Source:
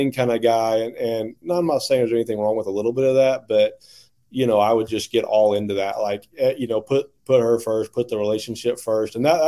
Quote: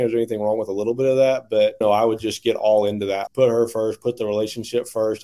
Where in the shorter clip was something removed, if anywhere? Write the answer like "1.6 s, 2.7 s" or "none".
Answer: 1.8 s, 3.2 s